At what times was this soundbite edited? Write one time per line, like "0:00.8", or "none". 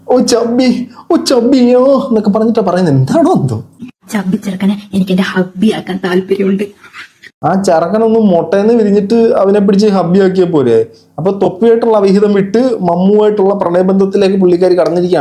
none